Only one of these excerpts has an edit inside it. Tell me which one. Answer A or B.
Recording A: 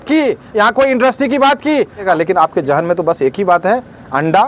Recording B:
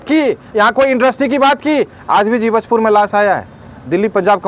A